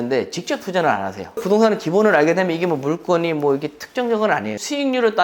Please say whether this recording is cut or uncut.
cut